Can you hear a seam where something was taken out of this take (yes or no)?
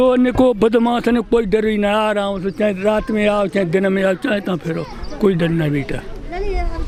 no